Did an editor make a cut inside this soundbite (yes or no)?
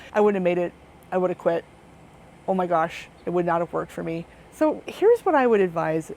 no